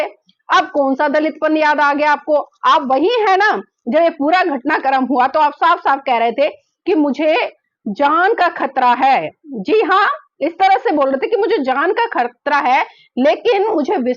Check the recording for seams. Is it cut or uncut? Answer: uncut